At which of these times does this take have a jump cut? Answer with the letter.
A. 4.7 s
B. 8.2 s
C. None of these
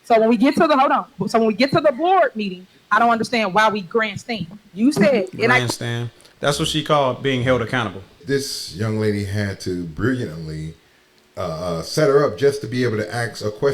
B